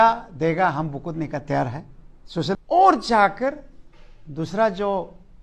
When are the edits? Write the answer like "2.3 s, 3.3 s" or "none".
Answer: 2.6 s